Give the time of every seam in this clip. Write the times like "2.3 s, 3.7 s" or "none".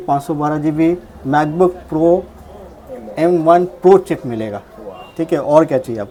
none